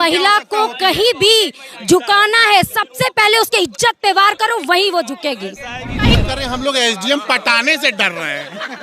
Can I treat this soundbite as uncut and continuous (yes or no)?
no